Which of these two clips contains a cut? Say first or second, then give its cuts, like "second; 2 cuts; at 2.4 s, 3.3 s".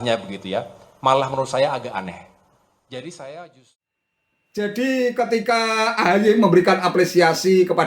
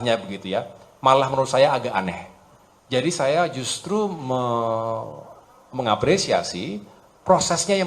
first; 1 cut; at 3.8 s